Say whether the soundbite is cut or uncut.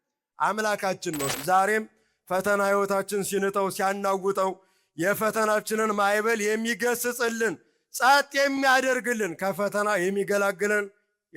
cut